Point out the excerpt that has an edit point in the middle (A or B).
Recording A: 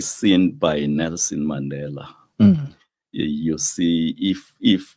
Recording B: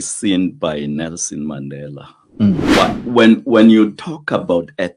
B